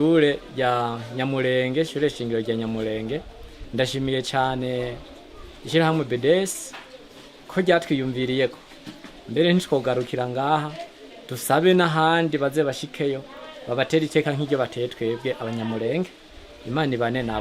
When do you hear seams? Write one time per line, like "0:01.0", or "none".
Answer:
none